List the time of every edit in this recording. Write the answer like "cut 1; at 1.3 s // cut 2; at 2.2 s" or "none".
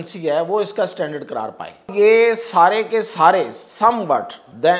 cut 1; at 1.9 s